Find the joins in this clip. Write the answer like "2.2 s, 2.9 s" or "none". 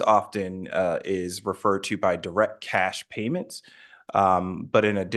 none

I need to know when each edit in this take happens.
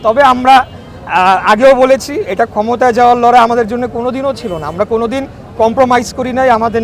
none

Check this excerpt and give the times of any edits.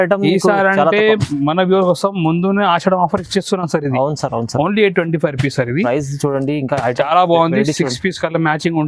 none

